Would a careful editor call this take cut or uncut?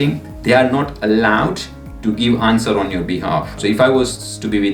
cut